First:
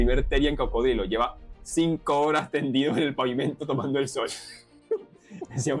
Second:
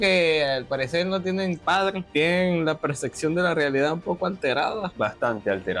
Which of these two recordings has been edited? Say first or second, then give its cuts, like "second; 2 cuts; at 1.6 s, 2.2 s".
second; 2 cuts; at 2.0 s, 4.9 s